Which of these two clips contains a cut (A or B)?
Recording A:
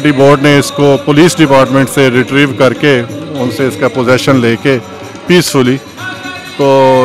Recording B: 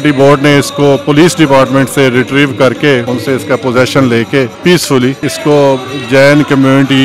B